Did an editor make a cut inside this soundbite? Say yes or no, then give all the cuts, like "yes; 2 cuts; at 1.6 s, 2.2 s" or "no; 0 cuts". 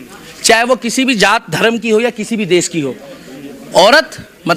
no; 0 cuts